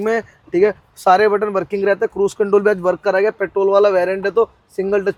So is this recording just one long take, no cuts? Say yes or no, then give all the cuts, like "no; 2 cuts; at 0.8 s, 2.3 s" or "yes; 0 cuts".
yes; 0 cuts